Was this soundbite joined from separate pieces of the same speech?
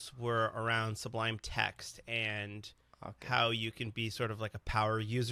no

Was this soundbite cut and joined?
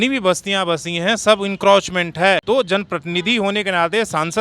yes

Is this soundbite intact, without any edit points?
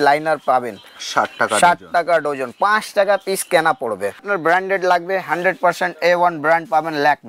no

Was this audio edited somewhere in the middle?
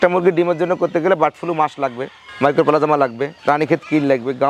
no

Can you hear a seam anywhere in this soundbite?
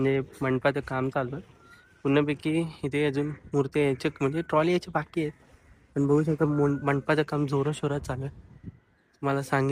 no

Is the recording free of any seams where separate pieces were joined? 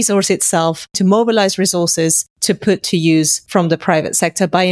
no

